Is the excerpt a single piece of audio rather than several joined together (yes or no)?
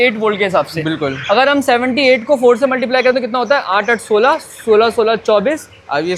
yes